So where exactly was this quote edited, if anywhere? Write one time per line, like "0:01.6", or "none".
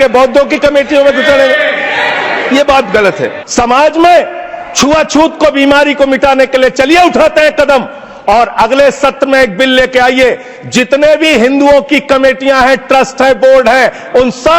0:03.4